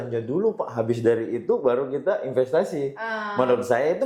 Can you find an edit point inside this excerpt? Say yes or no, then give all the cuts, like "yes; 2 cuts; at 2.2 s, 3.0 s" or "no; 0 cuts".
no; 0 cuts